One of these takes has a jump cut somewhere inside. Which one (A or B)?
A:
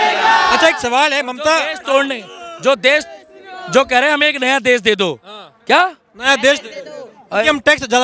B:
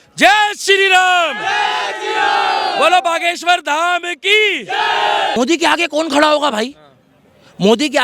B